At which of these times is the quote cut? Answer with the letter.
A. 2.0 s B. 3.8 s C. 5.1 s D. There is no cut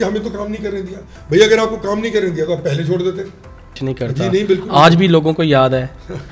B